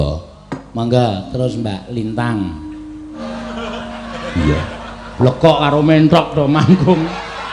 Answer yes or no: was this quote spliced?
yes